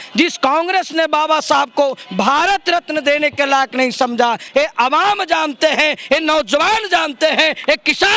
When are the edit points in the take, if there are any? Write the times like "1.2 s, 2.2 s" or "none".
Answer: 4.5 s

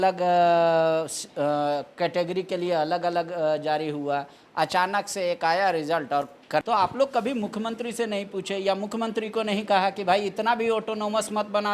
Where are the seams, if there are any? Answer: 6.6 s

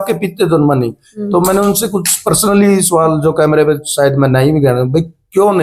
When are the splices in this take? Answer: none

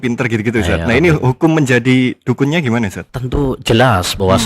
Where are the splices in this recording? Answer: 3.1 s

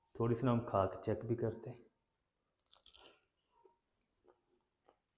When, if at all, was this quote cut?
none

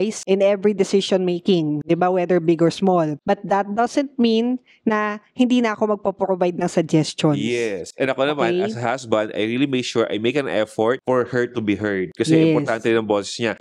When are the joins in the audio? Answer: none

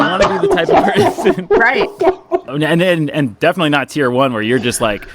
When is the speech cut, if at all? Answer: 2.5 s

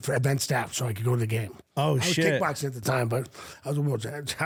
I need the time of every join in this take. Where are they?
none

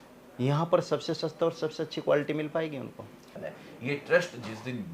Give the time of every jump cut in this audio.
3.3 s

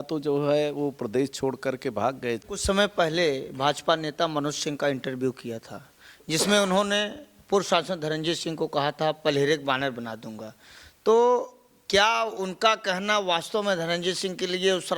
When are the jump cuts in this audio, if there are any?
2.4 s

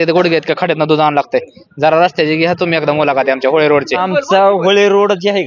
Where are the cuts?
4.0 s

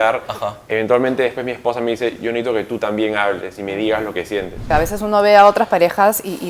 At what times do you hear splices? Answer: 4.7 s

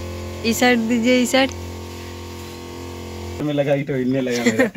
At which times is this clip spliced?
3.4 s

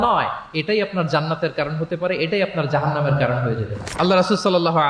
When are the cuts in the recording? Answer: none

